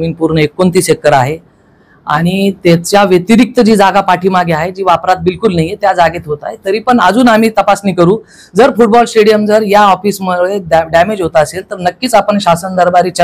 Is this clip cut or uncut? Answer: uncut